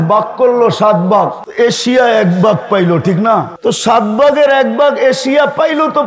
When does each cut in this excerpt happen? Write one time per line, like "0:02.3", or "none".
0:01.4
0:03.5

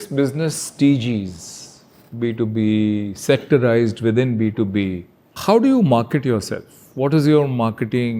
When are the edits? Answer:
0:05.3

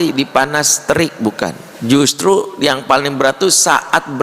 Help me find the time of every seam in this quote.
0:01.7

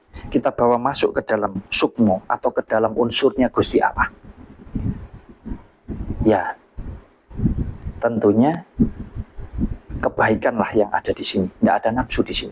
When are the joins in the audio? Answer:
none

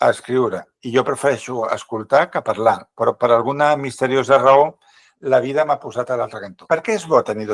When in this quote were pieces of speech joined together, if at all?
0:06.5

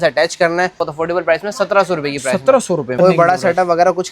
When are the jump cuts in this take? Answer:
0:00.8
0:03.0

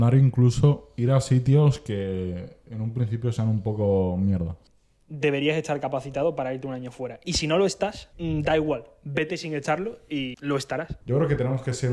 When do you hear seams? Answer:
0:04.6
0:08.1
0:10.5

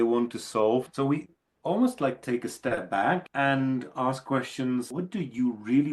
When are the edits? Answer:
0:00.9
0:03.3
0:04.9

